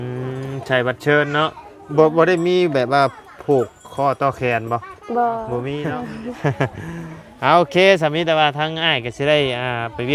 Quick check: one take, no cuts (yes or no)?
no